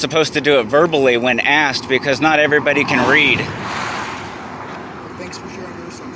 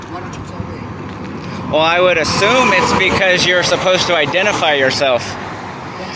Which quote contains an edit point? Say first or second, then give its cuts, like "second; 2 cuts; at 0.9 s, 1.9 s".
first; 1 cut; at 4.4 s